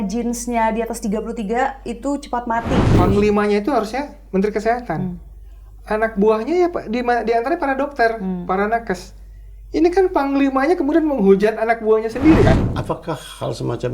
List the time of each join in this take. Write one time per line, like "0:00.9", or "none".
0:02.9
0:12.6